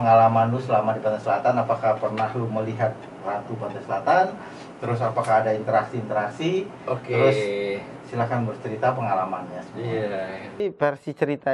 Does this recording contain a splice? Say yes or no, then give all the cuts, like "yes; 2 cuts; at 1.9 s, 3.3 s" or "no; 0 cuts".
yes; 1 cut; at 10.6 s